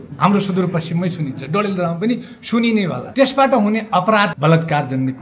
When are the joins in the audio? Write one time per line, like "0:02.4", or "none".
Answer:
0:03.0
0:04.3